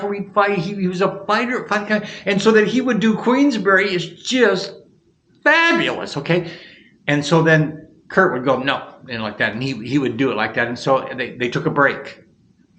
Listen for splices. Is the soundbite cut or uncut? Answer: uncut